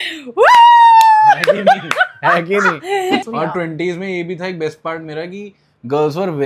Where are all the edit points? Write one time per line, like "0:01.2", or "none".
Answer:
0:03.3